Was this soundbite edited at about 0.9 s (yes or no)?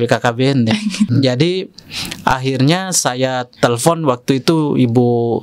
no